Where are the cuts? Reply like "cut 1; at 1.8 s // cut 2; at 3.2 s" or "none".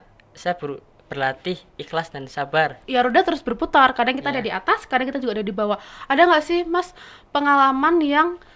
cut 1; at 2.8 s